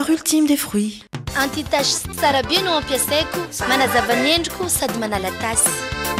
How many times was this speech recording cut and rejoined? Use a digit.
1